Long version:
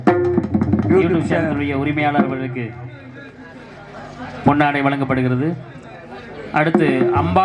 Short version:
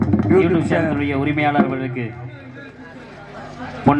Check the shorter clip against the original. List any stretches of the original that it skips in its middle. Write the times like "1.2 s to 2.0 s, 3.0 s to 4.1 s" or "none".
none